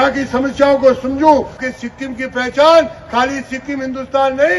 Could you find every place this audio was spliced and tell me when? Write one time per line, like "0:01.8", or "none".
0:01.7